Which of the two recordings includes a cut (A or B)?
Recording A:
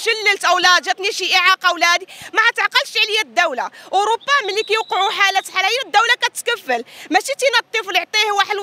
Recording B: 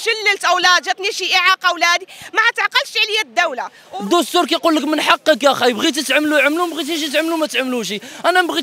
B